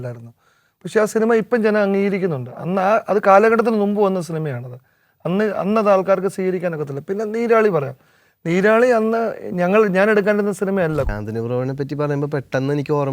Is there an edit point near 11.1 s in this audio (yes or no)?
yes